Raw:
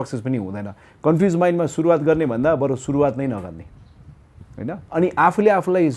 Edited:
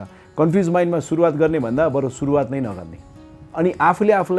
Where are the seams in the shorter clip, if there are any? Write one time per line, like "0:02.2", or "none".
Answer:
0:03.4